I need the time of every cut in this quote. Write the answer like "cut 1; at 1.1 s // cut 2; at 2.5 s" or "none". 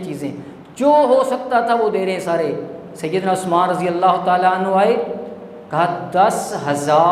none